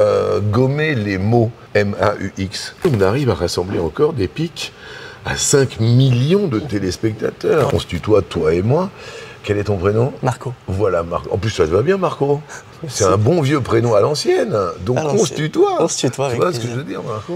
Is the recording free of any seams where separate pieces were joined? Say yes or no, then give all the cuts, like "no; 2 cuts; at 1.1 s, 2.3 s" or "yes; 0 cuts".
no; 3 cuts; at 1.6 s, 2.8 s, 7.7 s